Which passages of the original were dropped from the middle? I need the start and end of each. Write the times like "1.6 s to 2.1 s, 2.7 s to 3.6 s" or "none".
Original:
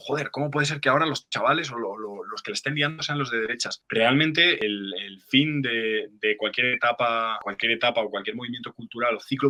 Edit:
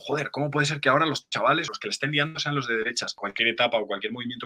1.7 s to 2.3 s, 3.8 s to 7.4 s